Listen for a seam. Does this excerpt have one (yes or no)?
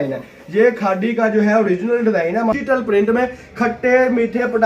yes